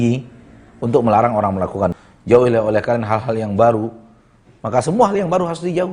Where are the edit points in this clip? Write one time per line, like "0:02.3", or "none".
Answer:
0:02.0